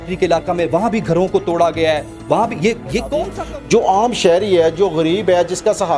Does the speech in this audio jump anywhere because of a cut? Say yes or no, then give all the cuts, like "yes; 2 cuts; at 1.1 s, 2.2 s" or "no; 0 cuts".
yes; 1 cut; at 3.4 s